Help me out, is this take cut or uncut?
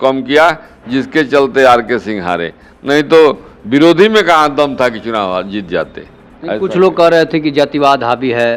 uncut